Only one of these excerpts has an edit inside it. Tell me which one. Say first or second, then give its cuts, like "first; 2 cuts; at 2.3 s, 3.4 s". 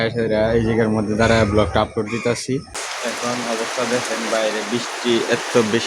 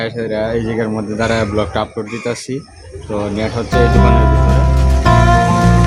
first; 1 cut; at 3.0 s